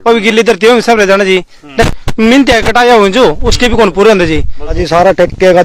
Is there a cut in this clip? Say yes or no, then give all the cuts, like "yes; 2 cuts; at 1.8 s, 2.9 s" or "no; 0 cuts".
yes; 2 cuts; at 2.0 s, 4.8 s